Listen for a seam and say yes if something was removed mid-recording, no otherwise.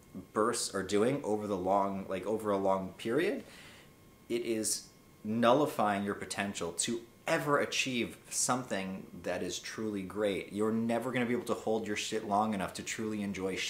no